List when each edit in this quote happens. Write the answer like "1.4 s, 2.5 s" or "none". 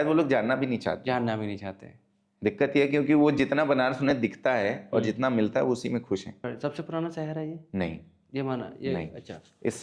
6.3 s